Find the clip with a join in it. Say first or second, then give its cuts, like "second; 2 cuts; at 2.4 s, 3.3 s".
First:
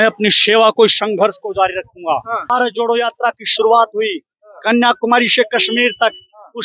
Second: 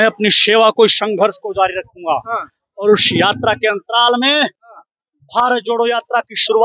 first; 1 cut; at 2.5 s